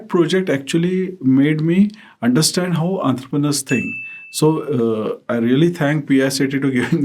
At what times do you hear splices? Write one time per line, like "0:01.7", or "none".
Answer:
none